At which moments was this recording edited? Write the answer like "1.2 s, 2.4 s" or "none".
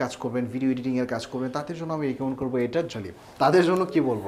2.9 s